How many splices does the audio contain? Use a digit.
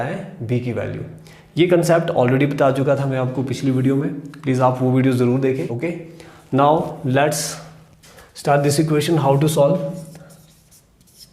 1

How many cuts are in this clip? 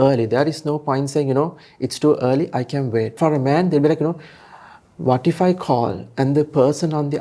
1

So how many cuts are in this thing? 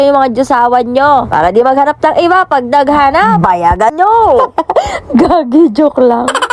1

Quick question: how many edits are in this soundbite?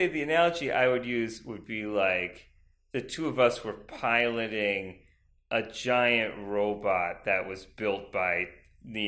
0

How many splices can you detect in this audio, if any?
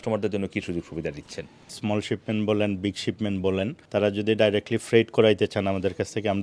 2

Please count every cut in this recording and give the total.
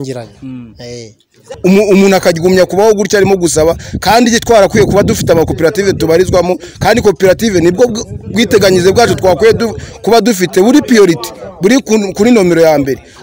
1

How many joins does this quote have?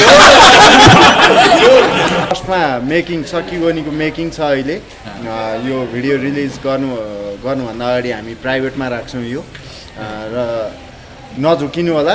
1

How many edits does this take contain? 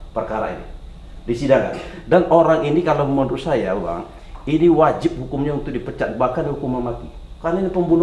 0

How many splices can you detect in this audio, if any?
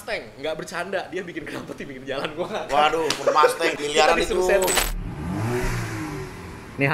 2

